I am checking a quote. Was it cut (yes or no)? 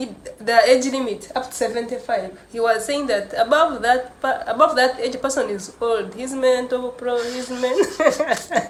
no